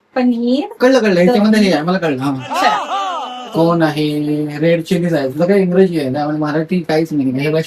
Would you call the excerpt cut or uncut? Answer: cut